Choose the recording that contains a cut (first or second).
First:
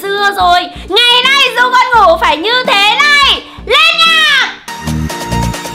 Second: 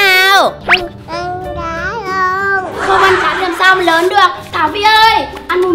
first